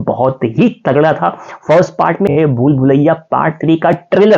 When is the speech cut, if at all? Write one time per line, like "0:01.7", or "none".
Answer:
0:02.3